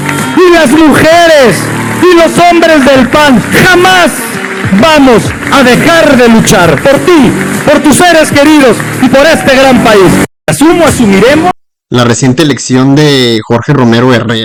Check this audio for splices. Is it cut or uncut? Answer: uncut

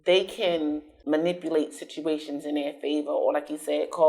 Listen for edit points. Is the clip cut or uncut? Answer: cut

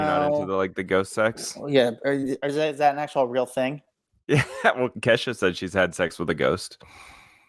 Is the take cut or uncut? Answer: cut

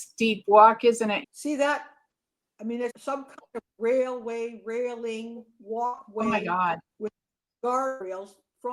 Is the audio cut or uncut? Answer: cut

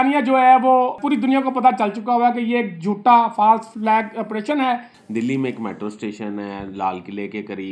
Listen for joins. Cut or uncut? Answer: cut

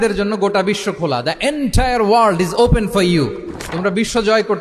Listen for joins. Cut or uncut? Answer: uncut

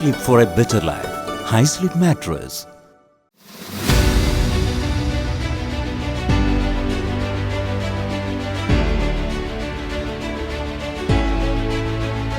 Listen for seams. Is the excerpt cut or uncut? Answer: uncut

